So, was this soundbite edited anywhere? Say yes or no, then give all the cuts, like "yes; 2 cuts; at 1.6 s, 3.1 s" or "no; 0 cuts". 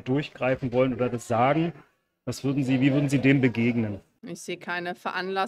yes; 1 cut; at 4.1 s